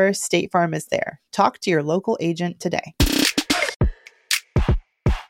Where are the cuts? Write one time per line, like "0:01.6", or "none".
0:03.7